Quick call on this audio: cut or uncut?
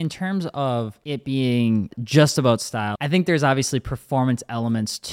cut